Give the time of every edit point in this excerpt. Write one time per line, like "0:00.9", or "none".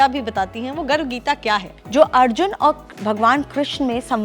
0:01.8